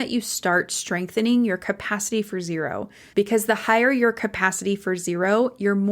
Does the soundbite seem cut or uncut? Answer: cut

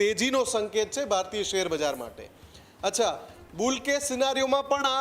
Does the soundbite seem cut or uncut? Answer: uncut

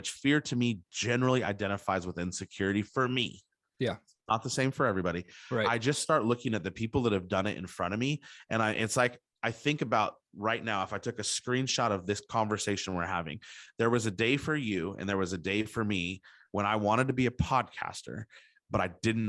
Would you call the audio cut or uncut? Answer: uncut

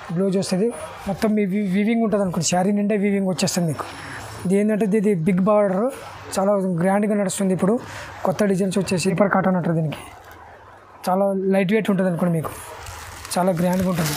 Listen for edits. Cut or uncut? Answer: cut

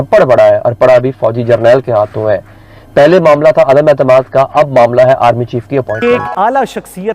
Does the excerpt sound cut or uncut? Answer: cut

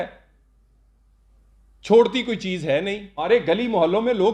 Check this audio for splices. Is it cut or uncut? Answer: cut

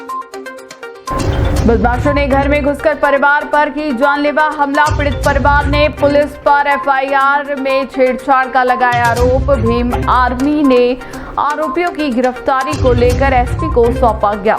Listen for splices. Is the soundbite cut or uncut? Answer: uncut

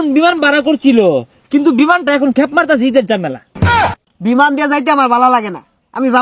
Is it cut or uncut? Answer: cut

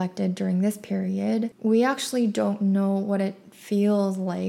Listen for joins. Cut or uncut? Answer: uncut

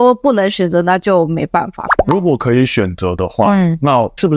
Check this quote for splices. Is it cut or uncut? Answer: uncut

